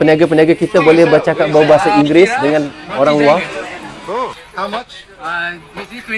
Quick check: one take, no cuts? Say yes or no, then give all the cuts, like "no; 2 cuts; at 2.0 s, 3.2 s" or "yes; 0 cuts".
yes; 0 cuts